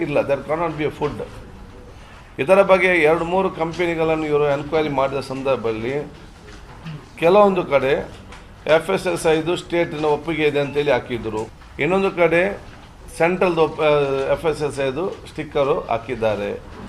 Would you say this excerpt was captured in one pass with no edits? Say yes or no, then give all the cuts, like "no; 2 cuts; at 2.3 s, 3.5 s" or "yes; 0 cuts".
yes; 0 cuts